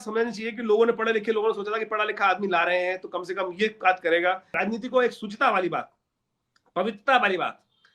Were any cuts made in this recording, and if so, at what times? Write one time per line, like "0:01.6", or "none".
0:04.5